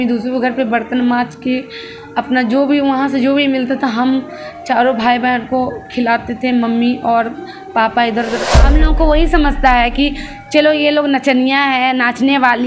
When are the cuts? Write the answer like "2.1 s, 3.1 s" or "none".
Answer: 8.6 s